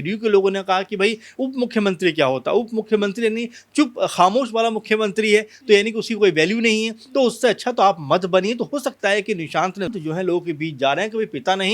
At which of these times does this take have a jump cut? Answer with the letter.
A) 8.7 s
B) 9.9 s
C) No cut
B